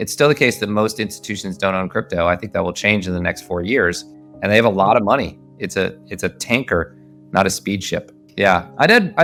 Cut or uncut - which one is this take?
uncut